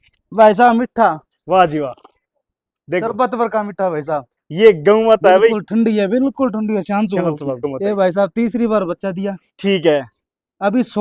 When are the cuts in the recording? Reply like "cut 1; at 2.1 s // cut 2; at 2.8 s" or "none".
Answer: cut 1; at 4.4 s // cut 2; at 7.6 s